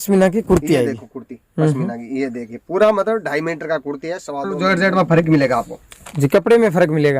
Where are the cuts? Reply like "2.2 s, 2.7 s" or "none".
4.5 s